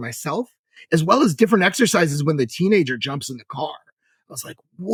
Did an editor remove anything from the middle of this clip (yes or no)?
no